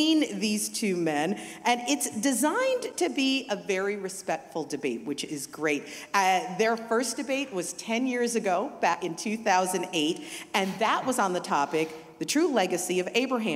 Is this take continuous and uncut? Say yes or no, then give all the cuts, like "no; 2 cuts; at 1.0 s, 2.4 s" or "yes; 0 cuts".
no; 1 cut; at 9.0 s